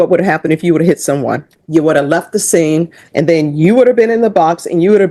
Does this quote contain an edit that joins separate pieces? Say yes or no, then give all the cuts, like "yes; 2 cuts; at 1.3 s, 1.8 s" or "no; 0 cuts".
yes; 2 cuts; at 1.6 s, 3.0 s